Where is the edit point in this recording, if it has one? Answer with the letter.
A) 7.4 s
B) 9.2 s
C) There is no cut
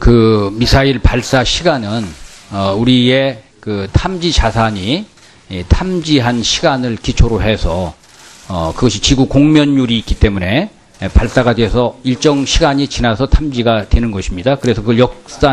A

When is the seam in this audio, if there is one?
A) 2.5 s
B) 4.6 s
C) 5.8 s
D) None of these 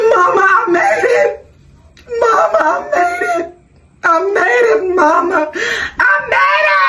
D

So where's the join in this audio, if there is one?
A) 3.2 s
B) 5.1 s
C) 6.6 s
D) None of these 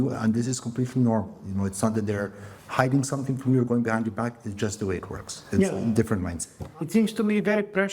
D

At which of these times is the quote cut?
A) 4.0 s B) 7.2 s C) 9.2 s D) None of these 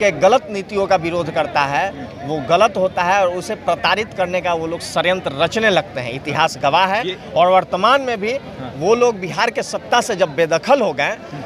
D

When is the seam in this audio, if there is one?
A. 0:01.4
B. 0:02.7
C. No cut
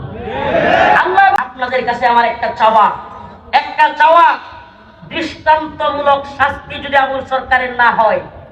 A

